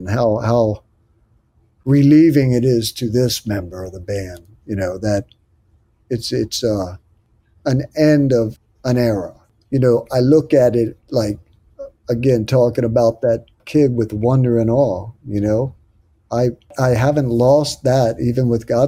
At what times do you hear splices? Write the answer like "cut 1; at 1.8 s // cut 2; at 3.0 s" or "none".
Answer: cut 1; at 8.6 s // cut 2; at 13.6 s // cut 3; at 16.7 s